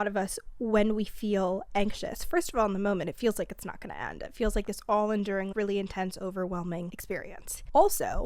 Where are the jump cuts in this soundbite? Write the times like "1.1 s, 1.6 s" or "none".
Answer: none